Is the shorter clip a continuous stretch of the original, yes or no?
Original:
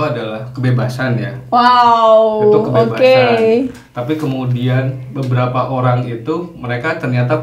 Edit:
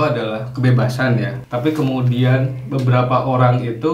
no